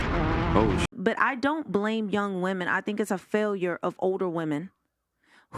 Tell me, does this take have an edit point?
yes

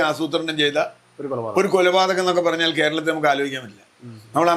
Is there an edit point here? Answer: no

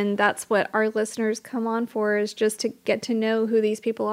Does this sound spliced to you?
yes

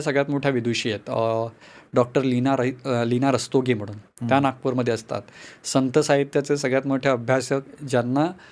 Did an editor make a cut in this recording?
no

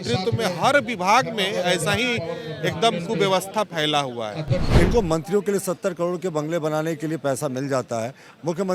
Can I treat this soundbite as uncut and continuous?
no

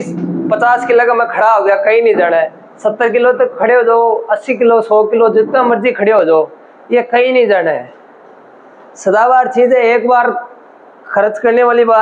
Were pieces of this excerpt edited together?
no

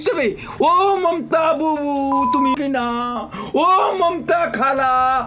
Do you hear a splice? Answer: no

